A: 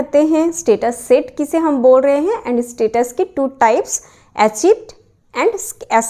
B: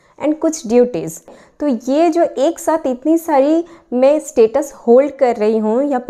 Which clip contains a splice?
B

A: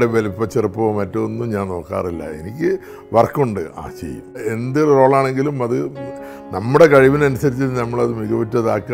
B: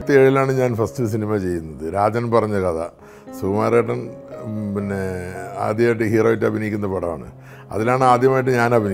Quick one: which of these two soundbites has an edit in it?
A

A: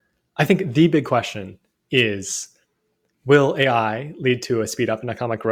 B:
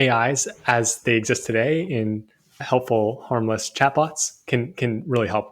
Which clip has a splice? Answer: B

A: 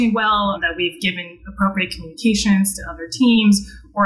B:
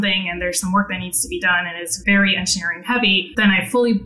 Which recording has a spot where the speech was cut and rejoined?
B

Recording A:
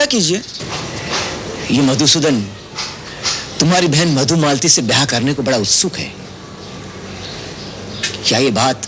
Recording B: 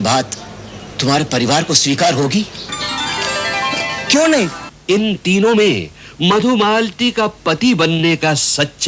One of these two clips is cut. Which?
B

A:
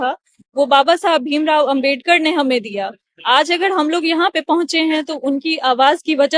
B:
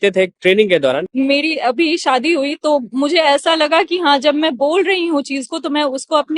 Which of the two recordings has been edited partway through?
B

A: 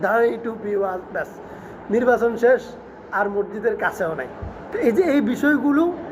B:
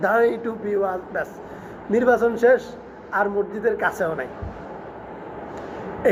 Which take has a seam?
A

